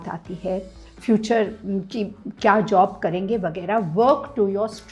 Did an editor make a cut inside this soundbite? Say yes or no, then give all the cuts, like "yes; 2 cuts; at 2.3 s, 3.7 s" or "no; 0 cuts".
no; 0 cuts